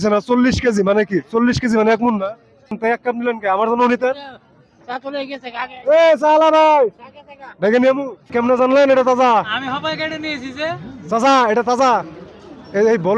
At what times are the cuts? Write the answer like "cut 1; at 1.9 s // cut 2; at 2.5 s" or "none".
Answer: cut 1; at 2.8 s // cut 2; at 8.3 s